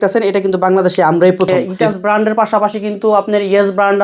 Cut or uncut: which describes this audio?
cut